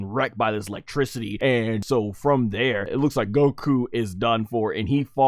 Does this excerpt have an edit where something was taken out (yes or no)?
yes